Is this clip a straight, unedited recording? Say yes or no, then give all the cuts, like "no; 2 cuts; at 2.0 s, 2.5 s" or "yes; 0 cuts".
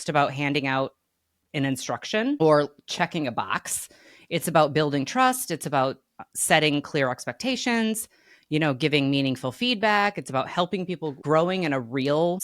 no; 1 cut; at 11.2 s